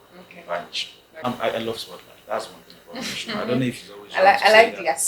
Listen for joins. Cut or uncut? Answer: cut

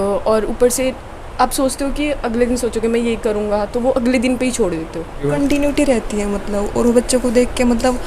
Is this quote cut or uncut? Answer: cut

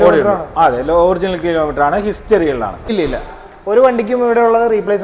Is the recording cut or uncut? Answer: cut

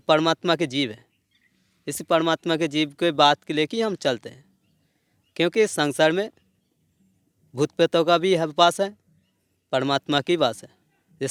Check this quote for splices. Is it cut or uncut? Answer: uncut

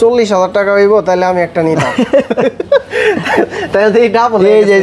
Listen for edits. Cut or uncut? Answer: uncut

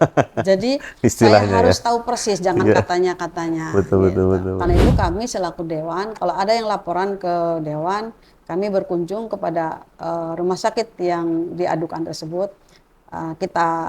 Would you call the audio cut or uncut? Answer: cut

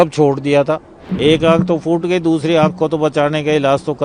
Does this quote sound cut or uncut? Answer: cut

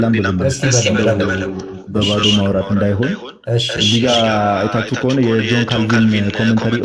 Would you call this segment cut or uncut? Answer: uncut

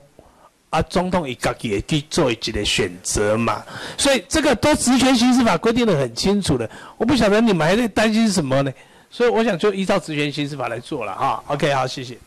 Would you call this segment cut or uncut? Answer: uncut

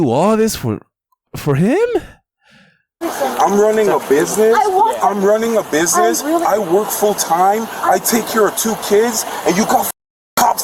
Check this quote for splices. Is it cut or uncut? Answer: cut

